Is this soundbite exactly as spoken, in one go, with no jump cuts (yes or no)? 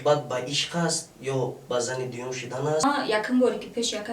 no